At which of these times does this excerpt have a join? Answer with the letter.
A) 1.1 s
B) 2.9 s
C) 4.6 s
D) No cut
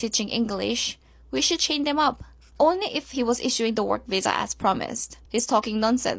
A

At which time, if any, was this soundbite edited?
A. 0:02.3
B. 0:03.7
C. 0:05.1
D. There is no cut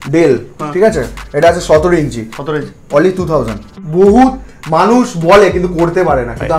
B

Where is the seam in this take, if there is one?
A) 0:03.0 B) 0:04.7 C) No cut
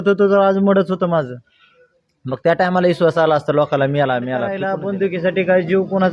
B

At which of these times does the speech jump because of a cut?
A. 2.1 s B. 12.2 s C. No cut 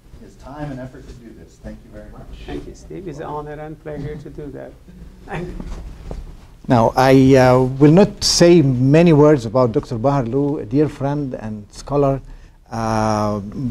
A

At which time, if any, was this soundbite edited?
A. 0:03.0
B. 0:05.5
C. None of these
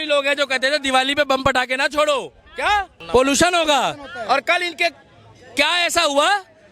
A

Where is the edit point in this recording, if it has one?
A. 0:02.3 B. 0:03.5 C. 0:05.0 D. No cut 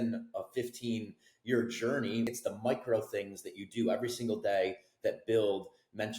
A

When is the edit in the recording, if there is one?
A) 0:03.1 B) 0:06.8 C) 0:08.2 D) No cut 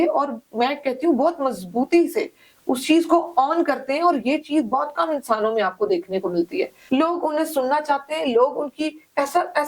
B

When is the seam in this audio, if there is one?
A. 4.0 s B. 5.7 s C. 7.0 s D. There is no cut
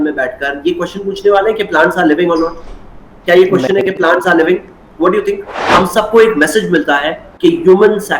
B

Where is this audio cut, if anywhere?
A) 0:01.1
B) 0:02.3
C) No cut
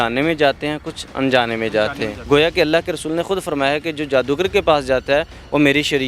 B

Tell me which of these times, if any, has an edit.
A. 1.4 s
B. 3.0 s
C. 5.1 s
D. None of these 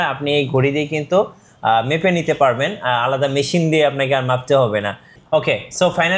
C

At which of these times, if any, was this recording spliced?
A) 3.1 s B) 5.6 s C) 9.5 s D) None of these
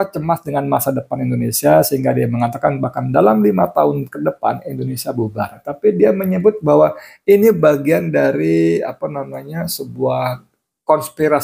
B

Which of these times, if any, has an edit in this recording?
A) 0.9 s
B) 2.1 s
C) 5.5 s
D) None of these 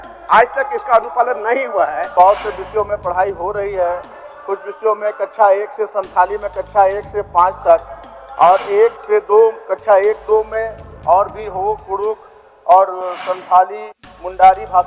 B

